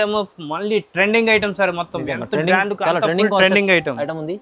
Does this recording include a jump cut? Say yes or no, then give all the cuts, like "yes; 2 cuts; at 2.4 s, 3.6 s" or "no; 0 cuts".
no; 0 cuts